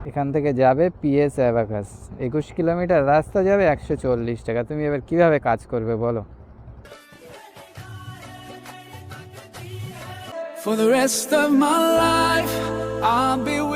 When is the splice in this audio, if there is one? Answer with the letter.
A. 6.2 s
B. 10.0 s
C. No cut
B